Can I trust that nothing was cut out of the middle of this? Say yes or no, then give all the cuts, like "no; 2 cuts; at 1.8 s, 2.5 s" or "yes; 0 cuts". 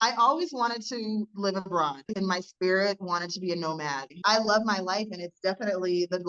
no; 2 cuts; at 2.1 s, 4.1 s